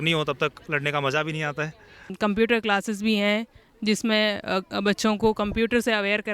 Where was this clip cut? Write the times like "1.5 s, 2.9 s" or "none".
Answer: 2.1 s